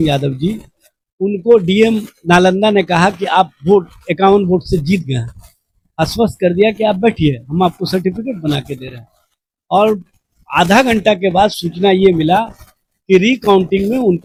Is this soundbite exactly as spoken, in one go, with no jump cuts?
yes; 0 cuts

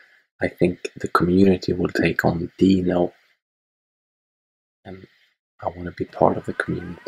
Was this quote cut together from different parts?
no; 0 cuts

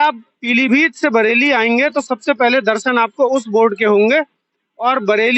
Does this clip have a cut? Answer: no; 0 cuts

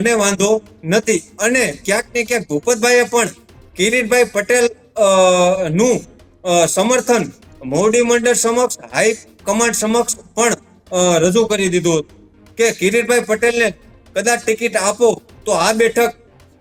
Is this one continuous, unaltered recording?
yes; 0 cuts

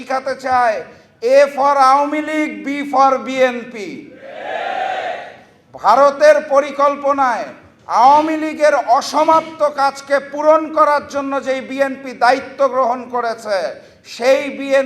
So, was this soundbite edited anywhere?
no; 0 cuts

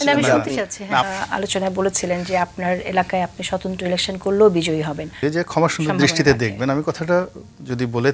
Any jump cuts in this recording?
yes; 2 cuts; at 1.1 s, 5.2 s

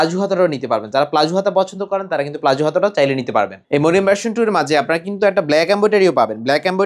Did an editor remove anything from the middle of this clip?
no; 0 cuts

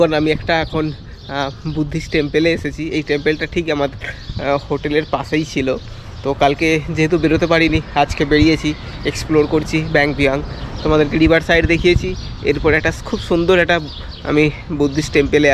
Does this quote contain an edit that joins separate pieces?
no; 0 cuts

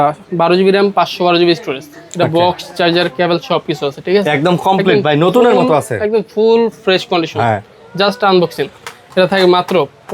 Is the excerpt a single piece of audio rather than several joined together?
yes; 0 cuts

